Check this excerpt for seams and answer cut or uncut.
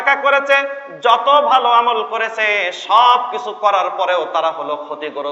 uncut